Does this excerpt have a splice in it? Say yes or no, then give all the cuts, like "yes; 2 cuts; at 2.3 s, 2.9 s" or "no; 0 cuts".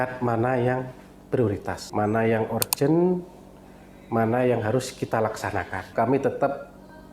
yes; 2 cuts; at 1.8 s, 5.8 s